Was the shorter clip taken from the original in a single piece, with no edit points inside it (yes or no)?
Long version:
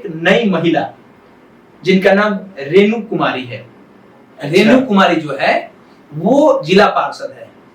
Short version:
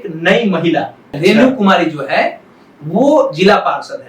no